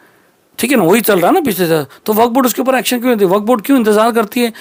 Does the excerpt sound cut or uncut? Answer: uncut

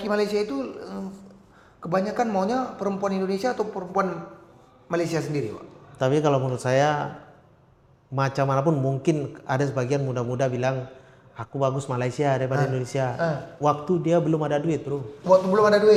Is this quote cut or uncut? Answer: uncut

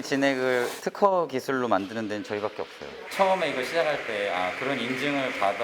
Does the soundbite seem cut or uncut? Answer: cut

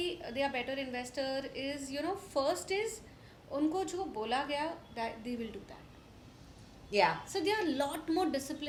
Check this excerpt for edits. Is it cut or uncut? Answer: uncut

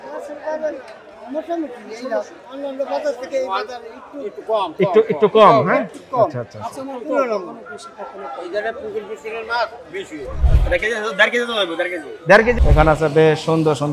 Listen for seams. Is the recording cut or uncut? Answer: cut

